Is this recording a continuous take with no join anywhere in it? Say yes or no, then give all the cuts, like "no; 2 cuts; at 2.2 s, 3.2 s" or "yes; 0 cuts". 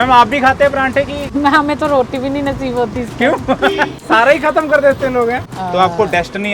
no; 3 cuts; at 1.3 s, 4.0 s, 5.5 s